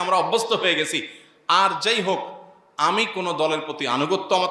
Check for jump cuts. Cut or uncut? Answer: uncut